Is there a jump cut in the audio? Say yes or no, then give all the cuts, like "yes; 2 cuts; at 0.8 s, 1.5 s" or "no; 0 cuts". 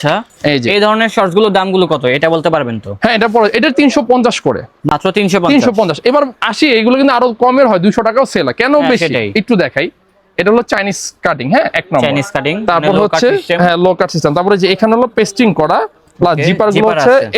no; 0 cuts